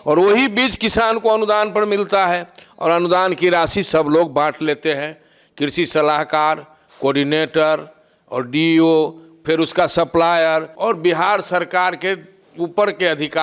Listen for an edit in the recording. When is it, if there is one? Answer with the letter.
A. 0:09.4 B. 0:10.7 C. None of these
B